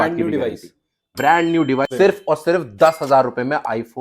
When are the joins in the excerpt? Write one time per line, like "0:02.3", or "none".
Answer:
0:01.9